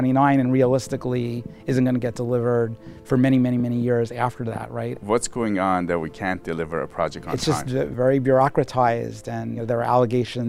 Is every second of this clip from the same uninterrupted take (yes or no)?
no